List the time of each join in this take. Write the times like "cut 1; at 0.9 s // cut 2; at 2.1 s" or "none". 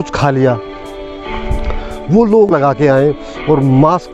cut 1; at 2.5 s